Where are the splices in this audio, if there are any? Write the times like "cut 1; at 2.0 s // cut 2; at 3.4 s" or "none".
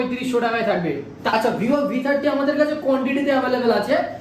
cut 1; at 1.2 s